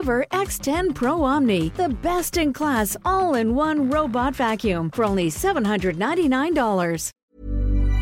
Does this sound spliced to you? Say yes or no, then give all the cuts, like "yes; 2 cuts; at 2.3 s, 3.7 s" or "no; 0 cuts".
yes; 1 cut; at 7.1 s